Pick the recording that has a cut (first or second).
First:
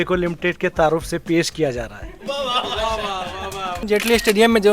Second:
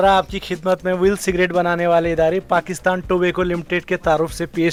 first